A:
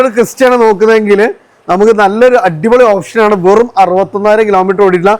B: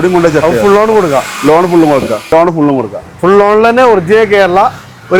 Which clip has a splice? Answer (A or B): B